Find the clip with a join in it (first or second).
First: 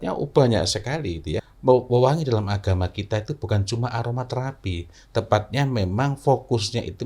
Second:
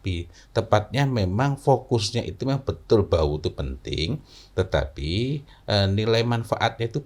first